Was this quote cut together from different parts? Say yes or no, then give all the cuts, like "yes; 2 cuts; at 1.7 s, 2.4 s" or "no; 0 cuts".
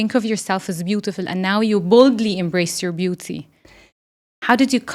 no; 0 cuts